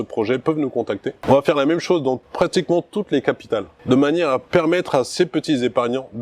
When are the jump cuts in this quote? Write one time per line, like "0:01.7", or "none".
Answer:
0:01.2
0:02.3
0:03.7